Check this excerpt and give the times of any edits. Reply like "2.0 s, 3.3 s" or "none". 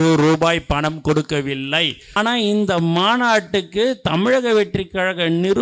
2.2 s